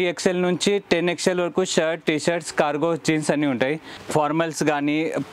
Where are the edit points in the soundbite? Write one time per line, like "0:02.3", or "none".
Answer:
0:03.9